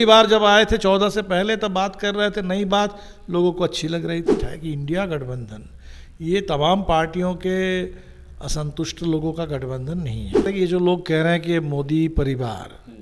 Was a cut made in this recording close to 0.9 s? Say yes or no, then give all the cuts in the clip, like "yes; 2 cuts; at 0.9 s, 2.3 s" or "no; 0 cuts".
no; 2 cuts; at 4.4 s, 10.4 s